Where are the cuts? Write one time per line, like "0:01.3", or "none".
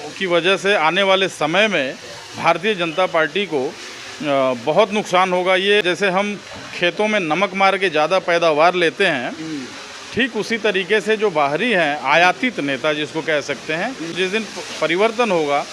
0:05.8
0:14.4